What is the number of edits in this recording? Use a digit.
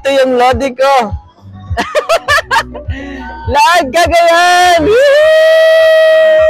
0